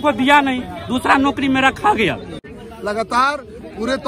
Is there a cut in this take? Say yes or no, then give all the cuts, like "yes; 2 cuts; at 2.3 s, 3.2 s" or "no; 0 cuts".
yes; 1 cut; at 2.5 s